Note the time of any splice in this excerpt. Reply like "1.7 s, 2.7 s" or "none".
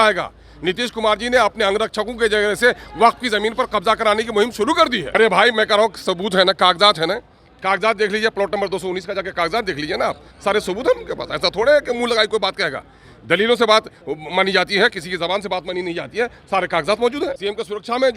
5.1 s, 17.4 s